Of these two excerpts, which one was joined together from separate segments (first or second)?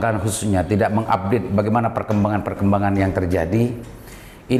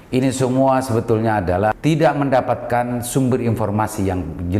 second